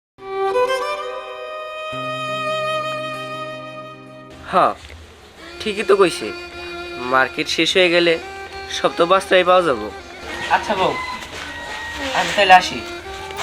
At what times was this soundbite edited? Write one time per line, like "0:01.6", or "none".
none